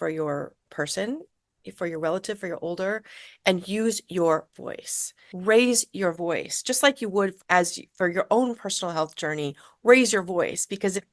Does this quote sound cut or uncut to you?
cut